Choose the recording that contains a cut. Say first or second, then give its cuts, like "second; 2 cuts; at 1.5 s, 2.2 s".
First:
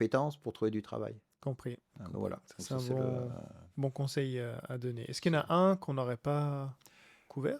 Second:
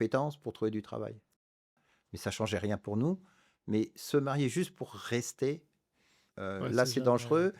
second; 1 cut; at 1.7 s